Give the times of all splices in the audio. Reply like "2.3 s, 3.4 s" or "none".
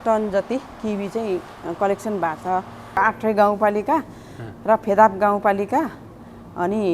3.0 s